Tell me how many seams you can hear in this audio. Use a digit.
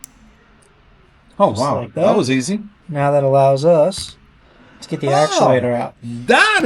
1